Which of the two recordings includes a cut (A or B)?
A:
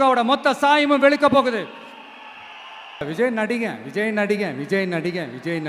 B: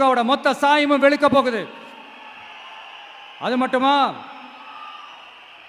A